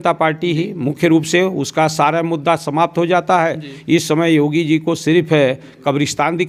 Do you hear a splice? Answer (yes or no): no